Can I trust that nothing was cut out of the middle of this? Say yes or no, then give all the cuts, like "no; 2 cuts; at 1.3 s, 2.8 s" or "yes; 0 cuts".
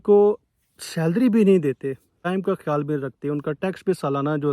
no; 1 cut; at 2.2 s